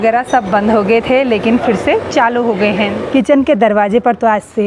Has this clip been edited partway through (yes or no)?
yes